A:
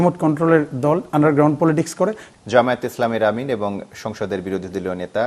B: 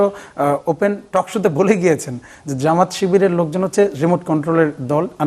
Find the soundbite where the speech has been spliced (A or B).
A